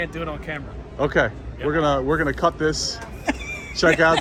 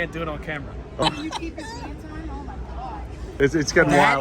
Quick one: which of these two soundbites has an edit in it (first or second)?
second